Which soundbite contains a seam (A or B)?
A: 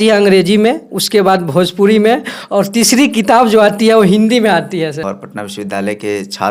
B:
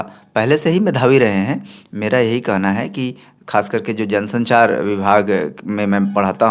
A